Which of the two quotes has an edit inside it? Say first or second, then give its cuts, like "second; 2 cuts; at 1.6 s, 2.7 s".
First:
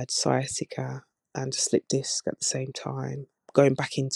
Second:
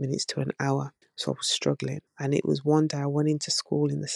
second; 2 cuts; at 1.0 s, 2.1 s